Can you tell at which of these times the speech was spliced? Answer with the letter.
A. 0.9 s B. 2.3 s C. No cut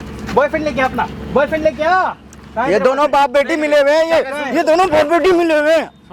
C